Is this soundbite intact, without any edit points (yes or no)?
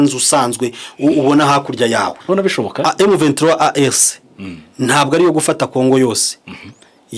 no